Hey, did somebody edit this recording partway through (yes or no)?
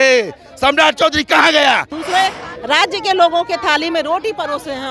yes